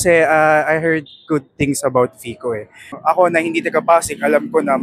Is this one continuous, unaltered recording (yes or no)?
no